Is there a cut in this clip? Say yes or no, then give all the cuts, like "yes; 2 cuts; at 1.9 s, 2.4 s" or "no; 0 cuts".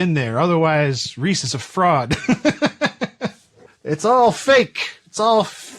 yes; 1 cut; at 3.9 s